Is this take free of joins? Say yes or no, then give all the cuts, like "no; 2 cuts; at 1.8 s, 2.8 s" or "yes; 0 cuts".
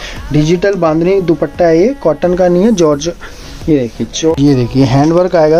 no; 1 cut; at 4.4 s